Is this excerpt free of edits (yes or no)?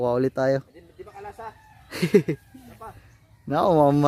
yes